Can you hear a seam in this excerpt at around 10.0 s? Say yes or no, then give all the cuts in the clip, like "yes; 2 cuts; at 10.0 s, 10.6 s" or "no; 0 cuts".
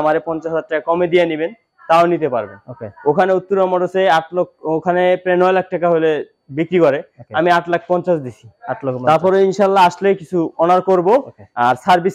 no; 0 cuts